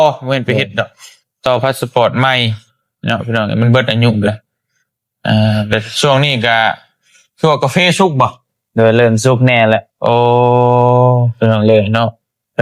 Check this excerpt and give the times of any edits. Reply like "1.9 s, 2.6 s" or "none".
none